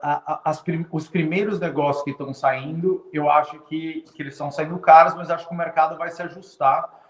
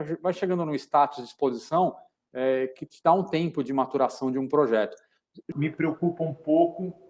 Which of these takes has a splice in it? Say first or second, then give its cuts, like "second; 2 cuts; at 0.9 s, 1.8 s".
second; 1 cut; at 5.5 s